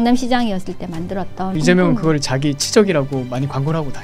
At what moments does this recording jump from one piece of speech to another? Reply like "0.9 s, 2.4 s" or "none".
1.5 s